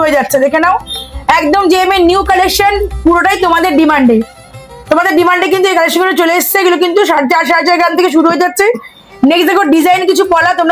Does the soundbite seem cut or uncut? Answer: uncut